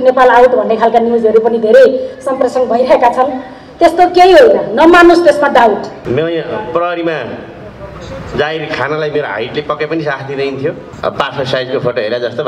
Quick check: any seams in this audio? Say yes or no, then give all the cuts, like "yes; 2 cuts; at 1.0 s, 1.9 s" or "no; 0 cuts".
yes; 2 cuts; at 5.9 s, 10.9 s